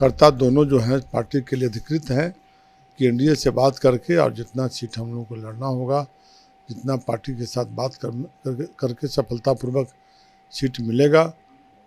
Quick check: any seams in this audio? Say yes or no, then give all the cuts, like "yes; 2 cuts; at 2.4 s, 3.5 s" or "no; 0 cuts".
no; 0 cuts